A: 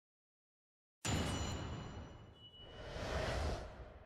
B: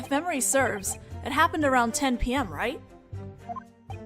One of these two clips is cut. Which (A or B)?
B